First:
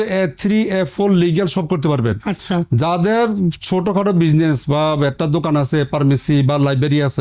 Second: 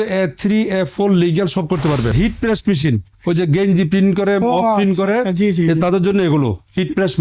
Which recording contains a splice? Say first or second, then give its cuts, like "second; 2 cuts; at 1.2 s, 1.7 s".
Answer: second; 1 cut; at 2.1 s